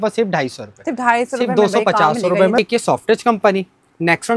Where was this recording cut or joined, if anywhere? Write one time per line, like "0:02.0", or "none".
0:02.6